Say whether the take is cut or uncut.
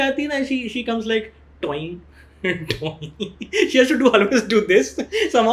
uncut